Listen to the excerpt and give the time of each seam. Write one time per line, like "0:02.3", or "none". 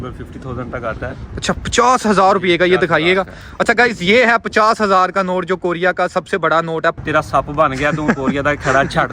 0:07.0